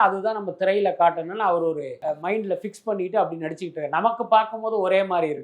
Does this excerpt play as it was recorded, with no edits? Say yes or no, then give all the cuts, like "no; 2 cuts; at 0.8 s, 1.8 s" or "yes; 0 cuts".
no; 1 cut; at 1.9 s